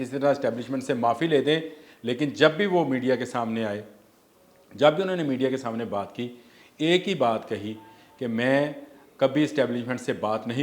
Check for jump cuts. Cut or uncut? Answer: uncut